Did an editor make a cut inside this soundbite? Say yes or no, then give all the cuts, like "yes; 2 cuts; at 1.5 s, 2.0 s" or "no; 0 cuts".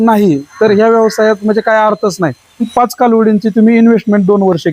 yes; 1 cut; at 2.7 s